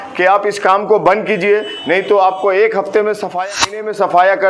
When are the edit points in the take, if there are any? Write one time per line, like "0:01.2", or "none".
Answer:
0:03.5